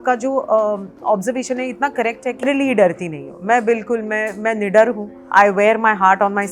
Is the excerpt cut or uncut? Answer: cut